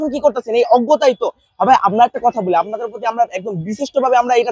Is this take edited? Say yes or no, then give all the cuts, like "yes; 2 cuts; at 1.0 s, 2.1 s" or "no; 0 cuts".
no; 0 cuts